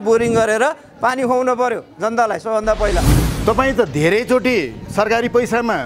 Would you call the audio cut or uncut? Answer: cut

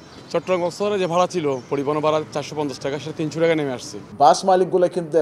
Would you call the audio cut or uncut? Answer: cut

